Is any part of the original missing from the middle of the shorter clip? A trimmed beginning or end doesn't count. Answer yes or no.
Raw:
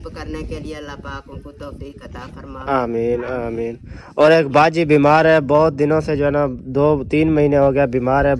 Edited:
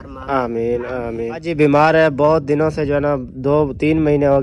yes